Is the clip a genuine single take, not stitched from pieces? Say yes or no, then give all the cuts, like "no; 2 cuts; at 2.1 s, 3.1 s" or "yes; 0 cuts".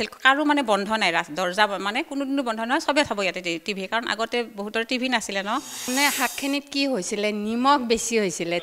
no; 1 cut; at 5.9 s